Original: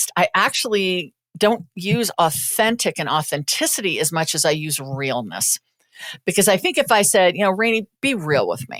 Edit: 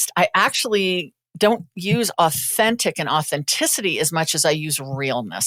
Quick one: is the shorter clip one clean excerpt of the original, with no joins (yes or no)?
yes